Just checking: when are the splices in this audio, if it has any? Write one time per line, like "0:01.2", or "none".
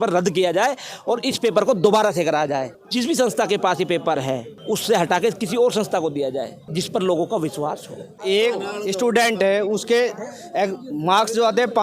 0:02.8
0:04.5
0:06.6
0:08.2